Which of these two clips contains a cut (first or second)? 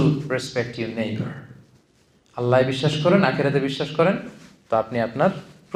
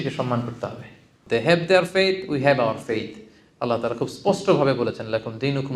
second